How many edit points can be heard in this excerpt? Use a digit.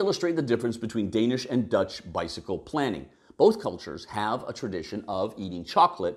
0